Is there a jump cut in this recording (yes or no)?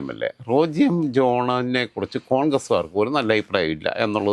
no